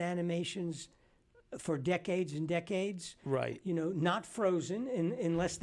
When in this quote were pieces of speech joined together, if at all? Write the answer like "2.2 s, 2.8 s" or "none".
none